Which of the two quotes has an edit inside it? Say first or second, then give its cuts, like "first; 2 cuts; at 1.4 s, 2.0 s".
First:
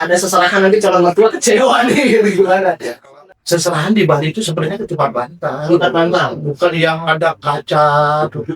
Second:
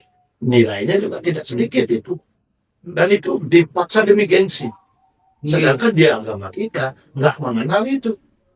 first; 1 cut; at 2.9 s